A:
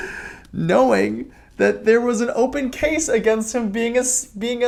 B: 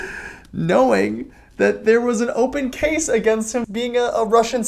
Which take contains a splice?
B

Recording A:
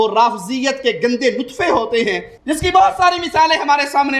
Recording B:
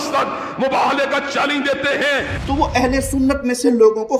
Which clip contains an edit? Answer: B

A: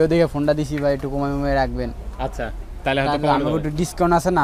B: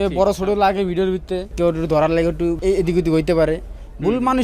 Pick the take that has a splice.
B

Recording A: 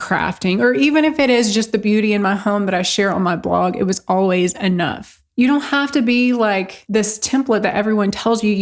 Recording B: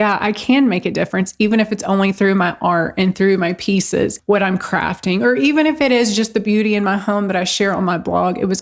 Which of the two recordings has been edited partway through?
A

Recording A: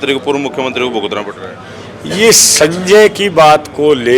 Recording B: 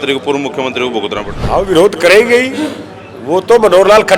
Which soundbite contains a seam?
B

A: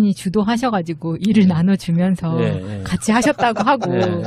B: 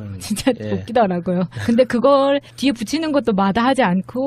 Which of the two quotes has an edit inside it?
A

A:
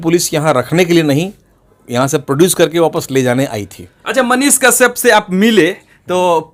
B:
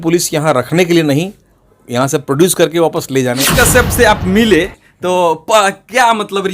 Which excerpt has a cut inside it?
B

